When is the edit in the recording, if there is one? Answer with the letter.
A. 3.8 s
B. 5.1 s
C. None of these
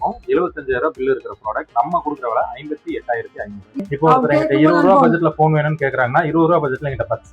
A